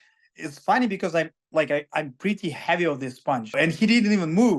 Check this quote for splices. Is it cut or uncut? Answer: cut